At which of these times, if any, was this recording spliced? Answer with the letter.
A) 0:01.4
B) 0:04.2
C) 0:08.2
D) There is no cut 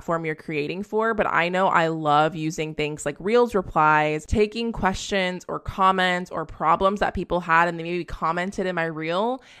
B